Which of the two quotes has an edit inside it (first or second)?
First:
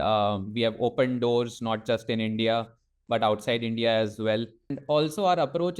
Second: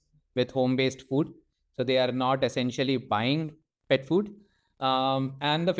first